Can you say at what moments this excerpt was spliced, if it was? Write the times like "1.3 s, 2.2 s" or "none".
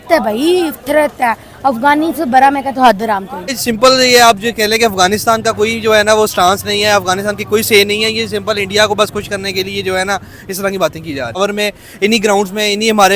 3.6 s, 11.4 s